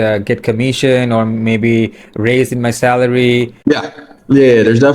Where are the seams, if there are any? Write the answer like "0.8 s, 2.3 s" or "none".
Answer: 3.5 s